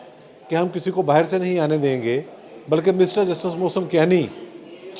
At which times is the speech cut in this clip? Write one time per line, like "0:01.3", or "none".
none